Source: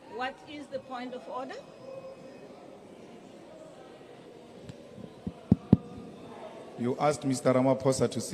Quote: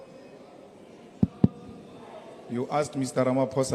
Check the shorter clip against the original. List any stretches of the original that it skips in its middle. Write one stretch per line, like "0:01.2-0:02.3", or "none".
0:03.3-0:05.4